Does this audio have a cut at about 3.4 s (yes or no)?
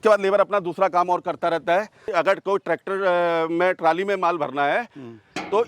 no